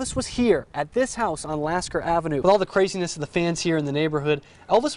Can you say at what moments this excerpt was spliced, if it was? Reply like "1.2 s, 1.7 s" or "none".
2.4 s